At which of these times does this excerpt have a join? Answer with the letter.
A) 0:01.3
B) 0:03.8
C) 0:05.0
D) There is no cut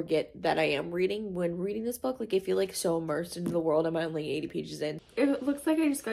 C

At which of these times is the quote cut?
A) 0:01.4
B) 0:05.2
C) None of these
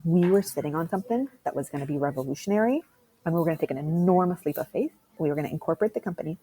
B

